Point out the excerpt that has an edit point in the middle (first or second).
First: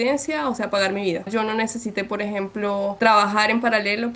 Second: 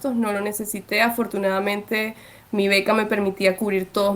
first